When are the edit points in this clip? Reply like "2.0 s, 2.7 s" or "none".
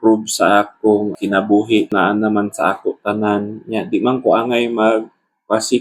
1.2 s, 1.9 s

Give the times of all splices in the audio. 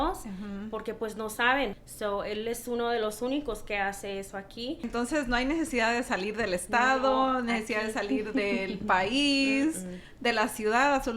1.8 s, 4.8 s

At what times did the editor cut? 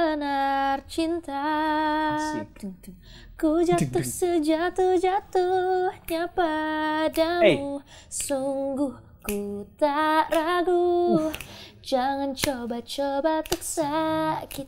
none

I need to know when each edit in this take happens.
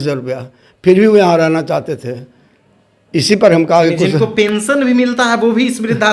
none

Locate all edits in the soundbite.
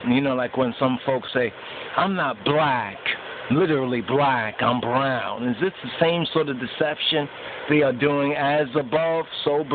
4.6 s

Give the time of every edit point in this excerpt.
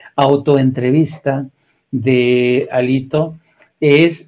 none

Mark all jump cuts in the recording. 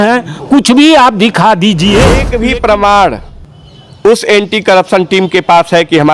2.3 s

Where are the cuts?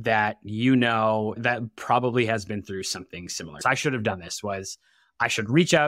3.6 s

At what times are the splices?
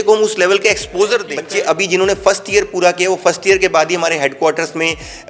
1.4 s

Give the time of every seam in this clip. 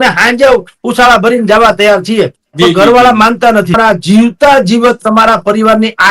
3.8 s

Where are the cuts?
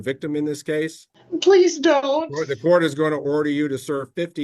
1.1 s

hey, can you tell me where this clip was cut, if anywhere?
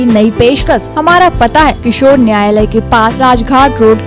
0.9 s, 1.8 s, 3.1 s

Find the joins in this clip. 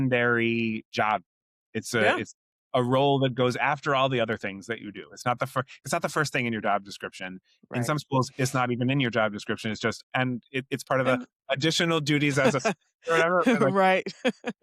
none

